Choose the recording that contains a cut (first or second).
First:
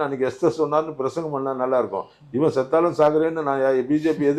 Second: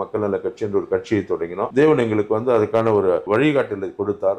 second